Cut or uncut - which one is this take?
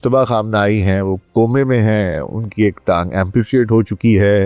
uncut